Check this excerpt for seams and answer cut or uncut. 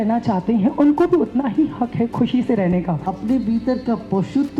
cut